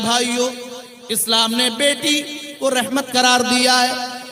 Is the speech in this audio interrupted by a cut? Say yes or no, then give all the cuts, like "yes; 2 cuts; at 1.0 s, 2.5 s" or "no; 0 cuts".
no; 0 cuts